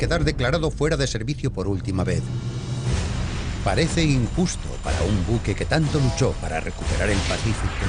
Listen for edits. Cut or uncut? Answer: uncut